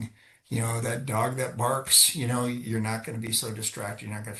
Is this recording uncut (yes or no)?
yes